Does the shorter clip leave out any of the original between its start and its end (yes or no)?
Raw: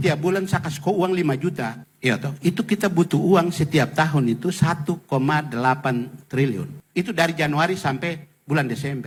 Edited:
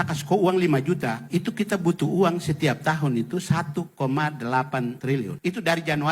yes